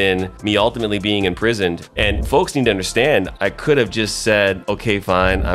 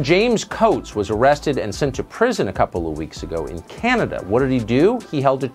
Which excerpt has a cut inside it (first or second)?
first